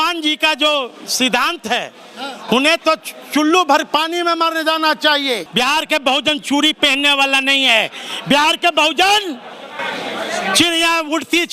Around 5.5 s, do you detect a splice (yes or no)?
yes